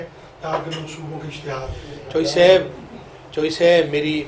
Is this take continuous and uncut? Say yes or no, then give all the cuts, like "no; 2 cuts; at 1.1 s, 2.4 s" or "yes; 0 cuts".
yes; 0 cuts